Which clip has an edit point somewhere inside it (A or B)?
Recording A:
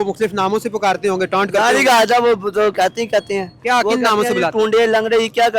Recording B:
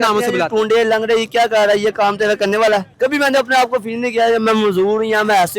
B